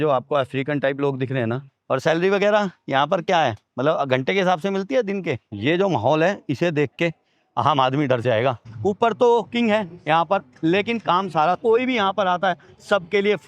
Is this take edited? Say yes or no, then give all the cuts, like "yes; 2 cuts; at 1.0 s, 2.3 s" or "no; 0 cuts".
yes; 5 cuts; at 1.7 s, 3.7 s, 5.5 s, 8.7 s, 11.6 s